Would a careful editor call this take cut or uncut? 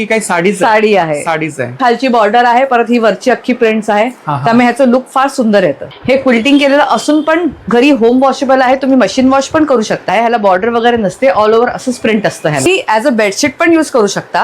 cut